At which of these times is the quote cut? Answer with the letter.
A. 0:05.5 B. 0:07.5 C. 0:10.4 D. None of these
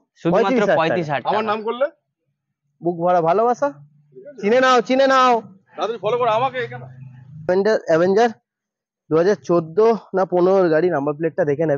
B